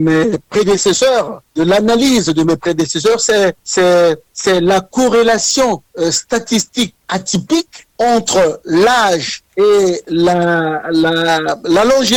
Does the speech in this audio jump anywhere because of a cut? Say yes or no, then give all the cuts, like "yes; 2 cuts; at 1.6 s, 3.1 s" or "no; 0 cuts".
no; 0 cuts